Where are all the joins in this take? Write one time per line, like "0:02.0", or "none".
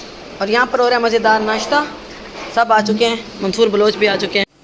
none